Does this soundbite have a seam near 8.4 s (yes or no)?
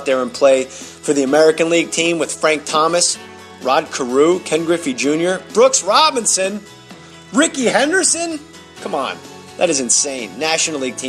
yes